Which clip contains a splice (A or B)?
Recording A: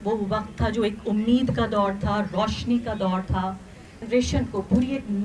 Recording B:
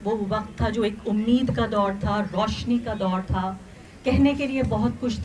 A